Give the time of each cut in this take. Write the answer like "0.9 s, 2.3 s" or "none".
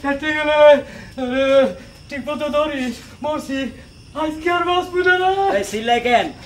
1.8 s